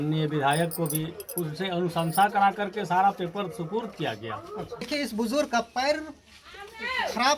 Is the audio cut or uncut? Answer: cut